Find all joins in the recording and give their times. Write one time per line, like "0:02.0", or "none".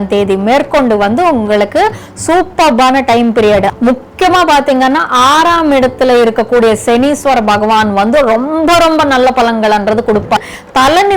0:03.7
0:10.4